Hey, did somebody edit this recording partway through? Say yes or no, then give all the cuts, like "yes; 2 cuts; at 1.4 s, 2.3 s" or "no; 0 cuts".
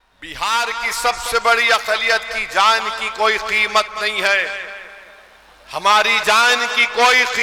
no; 0 cuts